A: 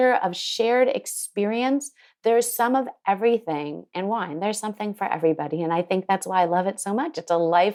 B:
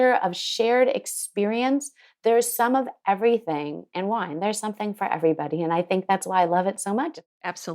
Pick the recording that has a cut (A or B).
B